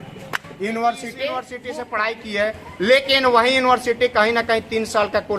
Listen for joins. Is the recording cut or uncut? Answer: cut